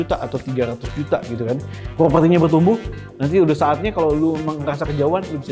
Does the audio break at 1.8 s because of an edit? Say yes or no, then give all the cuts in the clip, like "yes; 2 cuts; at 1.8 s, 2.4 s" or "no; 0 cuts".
yes; 1 cut; at 1.8 s